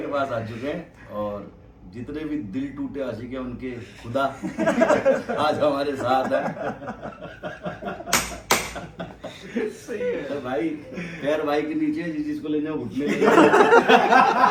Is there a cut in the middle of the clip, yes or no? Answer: no